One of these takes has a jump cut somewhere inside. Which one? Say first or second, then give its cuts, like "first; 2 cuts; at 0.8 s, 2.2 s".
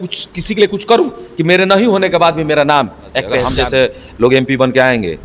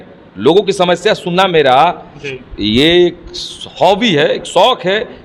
first; 1 cut; at 3.5 s